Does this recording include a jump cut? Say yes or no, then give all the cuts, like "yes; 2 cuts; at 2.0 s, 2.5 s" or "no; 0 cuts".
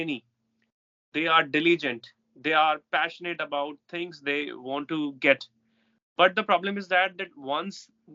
no; 0 cuts